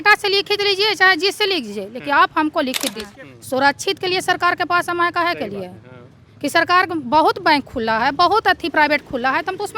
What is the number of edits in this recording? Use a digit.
1